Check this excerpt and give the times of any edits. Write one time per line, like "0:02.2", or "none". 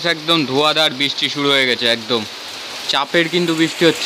none